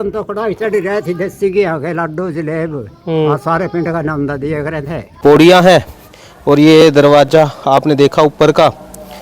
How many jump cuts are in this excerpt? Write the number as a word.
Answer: one